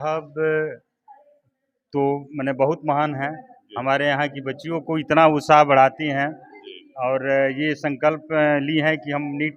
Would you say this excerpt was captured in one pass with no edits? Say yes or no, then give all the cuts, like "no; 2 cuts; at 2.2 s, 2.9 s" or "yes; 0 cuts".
yes; 0 cuts